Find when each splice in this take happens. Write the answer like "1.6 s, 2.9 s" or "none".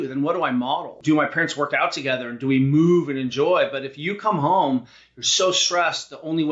1.0 s